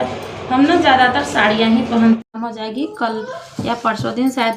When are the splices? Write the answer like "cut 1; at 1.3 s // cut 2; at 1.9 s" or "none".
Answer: cut 1; at 2.2 s

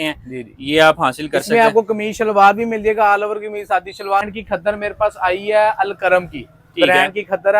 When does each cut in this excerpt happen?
cut 1; at 4.2 s

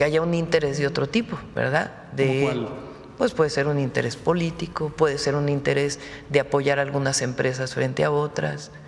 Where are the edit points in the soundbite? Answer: cut 1; at 1.4 s

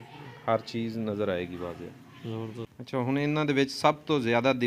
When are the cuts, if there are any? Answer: cut 1; at 2.8 s

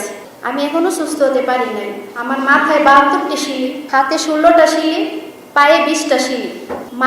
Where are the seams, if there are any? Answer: none

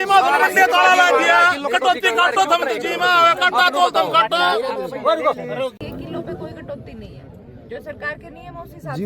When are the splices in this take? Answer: cut 1; at 5.8 s

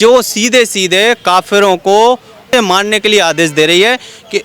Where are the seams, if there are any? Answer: cut 1; at 2.5 s

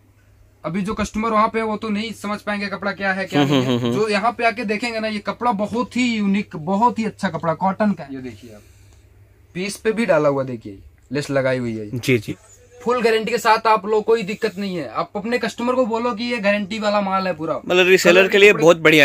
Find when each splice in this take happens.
cut 1; at 8.0 s // cut 2; at 12.3 s

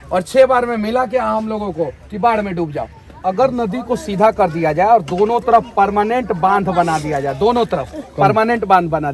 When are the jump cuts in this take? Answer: cut 1; at 3.2 s

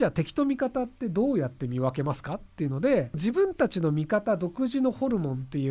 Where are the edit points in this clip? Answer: cut 1; at 3.2 s

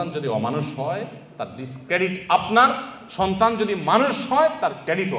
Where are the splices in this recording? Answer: none

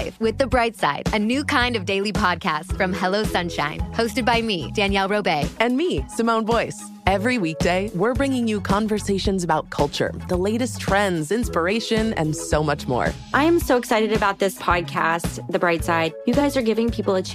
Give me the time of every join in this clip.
none

